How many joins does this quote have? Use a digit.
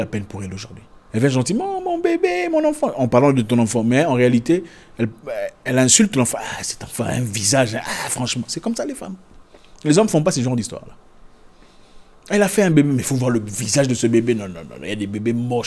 1